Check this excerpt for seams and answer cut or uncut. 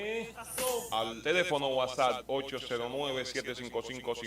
cut